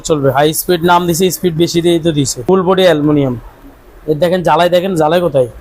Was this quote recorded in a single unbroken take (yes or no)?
no